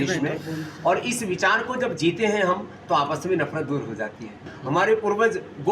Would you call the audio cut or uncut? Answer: cut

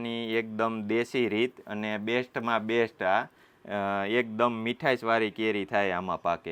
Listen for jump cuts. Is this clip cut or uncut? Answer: uncut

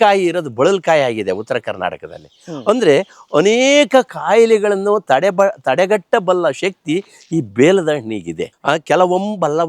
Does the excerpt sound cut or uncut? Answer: cut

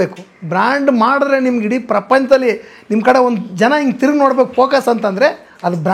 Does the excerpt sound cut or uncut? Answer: uncut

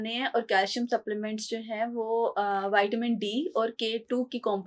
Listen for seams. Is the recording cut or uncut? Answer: uncut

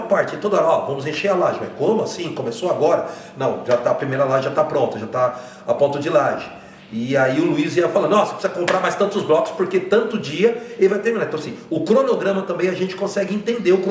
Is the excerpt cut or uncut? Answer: uncut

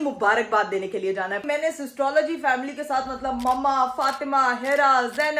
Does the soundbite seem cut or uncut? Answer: cut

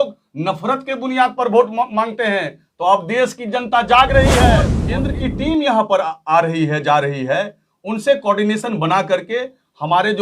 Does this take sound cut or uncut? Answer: cut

